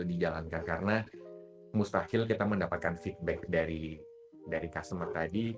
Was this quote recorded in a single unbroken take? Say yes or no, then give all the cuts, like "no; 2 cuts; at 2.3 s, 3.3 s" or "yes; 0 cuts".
yes; 0 cuts